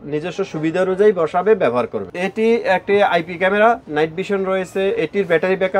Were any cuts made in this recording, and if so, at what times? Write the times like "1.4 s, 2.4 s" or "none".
2.0 s